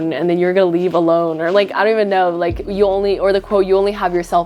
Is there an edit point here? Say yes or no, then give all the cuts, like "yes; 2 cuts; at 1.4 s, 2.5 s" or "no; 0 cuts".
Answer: no; 0 cuts